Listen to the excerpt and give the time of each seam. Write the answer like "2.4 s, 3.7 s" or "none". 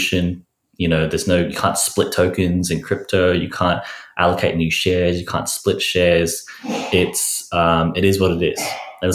none